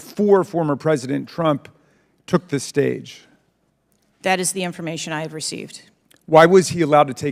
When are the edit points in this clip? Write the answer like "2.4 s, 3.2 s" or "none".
none